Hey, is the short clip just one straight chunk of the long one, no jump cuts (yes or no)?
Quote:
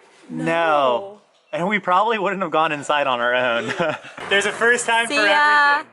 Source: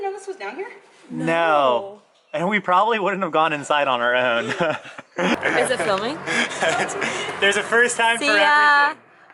no